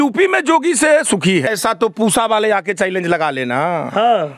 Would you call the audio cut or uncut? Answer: cut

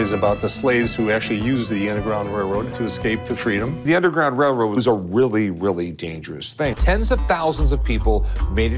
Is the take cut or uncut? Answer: uncut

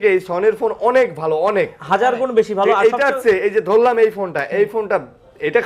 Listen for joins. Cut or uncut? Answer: uncut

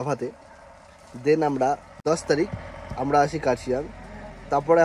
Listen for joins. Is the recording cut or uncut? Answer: cut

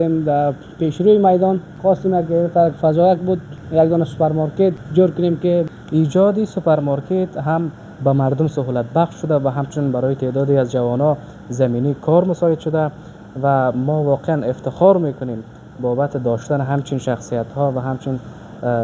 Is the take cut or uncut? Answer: cut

